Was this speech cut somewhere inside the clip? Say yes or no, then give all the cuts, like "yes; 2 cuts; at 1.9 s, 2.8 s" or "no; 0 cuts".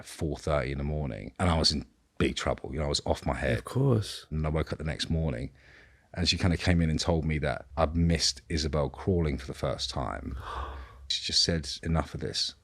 yes; 4 cuts; at 1.2 s, 4.3 s, 7.6 s, 11.7 s